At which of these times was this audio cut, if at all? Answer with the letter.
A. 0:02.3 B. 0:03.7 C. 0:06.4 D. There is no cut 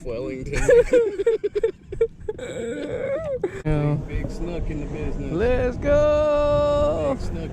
B